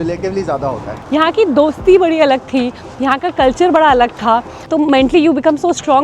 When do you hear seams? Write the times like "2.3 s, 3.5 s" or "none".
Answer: 0.9 s, 4.6 s

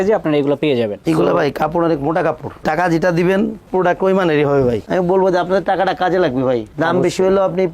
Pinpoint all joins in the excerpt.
1.0 s, 4.8 s

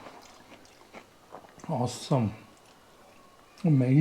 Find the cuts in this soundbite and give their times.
none

